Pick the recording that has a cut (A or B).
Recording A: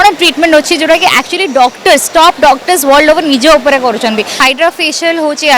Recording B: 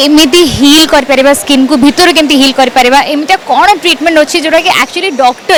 A